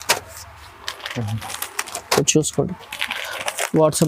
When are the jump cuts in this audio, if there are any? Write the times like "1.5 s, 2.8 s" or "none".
none